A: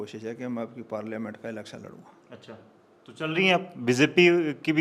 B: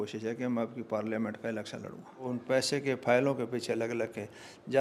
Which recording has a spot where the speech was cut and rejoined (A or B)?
B